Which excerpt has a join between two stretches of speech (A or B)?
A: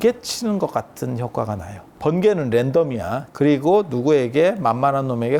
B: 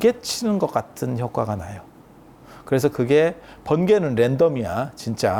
A